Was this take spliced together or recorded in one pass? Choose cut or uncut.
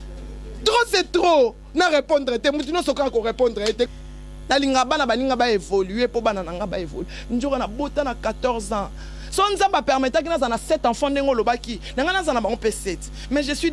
cut